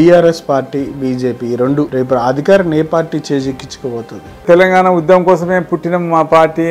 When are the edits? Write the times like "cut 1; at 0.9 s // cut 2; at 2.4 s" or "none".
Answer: cut 1; at 1.9 s // cut 2; at 4.4 s